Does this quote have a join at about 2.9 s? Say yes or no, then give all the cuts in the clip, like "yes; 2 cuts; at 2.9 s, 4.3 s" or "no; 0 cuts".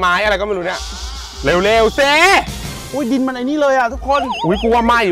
yes; 1 cut; at 2.9 s